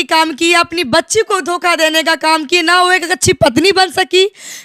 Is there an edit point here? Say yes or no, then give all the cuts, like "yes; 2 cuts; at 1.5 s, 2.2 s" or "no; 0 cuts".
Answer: no; 0 cuts